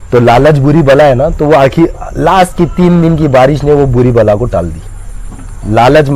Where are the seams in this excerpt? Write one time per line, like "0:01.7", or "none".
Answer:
none